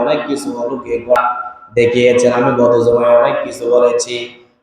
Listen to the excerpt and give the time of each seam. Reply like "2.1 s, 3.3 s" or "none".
1.2 s